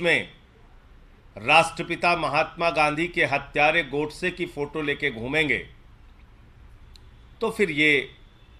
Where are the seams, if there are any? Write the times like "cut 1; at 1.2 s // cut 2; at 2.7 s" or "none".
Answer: none